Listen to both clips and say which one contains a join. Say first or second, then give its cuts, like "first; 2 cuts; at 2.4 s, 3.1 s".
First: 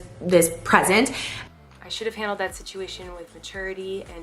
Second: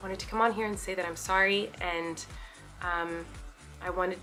first; 1 cut; at 1.5 s